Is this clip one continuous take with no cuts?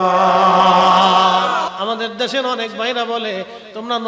no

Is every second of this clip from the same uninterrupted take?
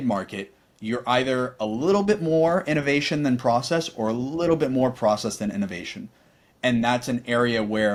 yes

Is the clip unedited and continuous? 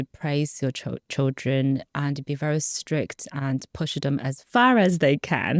no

